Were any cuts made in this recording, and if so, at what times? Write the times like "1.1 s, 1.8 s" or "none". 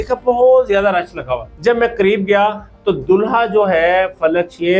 1.4 s